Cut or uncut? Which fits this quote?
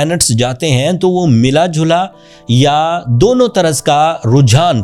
uncut